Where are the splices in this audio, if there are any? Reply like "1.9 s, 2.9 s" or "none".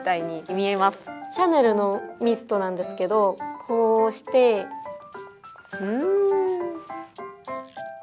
none